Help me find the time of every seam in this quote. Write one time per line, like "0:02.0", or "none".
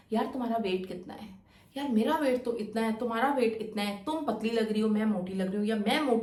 none